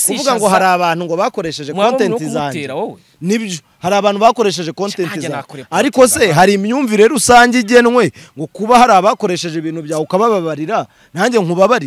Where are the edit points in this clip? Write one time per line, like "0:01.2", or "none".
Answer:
none